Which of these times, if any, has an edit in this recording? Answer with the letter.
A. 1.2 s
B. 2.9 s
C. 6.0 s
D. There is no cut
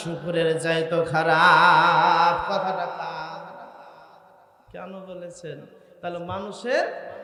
D